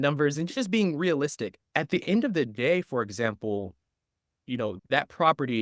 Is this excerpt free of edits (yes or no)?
no